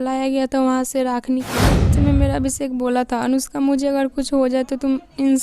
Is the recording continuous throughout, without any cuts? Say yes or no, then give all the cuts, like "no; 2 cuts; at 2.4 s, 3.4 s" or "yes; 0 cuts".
no; 1 cut; at 1.9 s